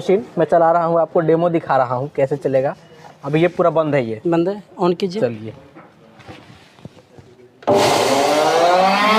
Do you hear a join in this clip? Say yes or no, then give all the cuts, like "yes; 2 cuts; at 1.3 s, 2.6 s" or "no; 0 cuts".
no; 0 cuts